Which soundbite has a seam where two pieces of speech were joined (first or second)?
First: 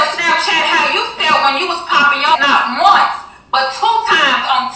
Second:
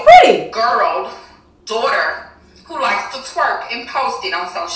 first